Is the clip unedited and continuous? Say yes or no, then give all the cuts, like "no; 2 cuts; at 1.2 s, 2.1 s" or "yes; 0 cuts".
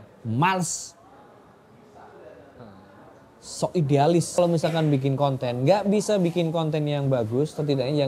no; 1 cut; at 4.4 s